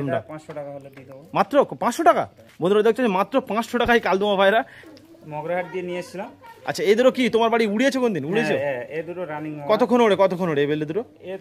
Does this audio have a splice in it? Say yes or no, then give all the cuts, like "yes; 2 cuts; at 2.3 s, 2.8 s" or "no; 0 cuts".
yes; 1 cut; at 4.8 s